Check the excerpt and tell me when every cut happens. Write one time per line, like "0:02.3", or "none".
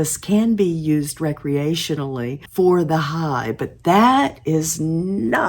none